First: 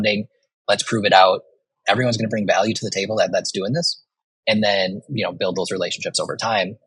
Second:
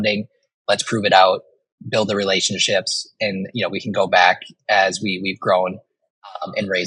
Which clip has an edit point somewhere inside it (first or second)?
first